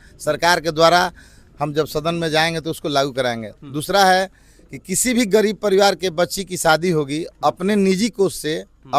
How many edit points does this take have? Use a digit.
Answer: 0